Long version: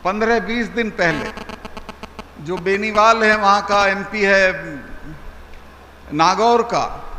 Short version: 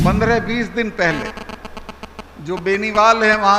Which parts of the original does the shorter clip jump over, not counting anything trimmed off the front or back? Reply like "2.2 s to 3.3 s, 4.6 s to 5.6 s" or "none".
none